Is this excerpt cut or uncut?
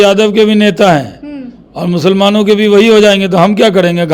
uncut